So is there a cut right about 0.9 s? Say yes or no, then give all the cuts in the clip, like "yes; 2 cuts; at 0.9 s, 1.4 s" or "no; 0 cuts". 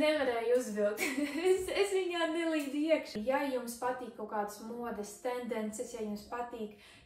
no; 1 cut; at 3.2 s